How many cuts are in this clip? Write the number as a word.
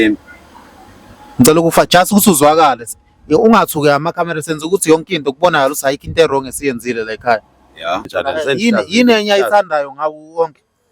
one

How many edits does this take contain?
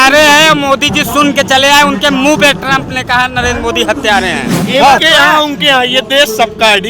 one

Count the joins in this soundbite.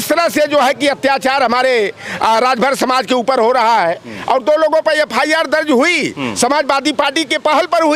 zero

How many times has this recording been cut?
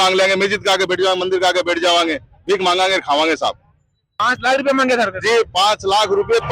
one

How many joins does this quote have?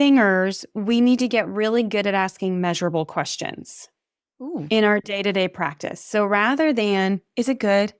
zero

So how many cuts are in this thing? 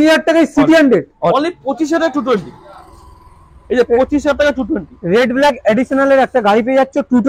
one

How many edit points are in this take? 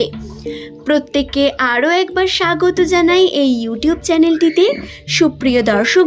zero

